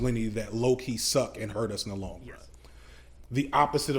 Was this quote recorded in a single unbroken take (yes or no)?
no